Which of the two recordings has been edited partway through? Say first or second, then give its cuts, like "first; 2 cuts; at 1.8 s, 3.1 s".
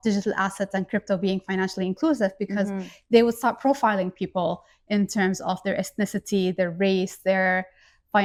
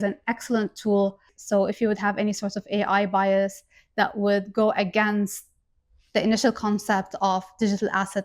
second; 1 cut; at 1.3 s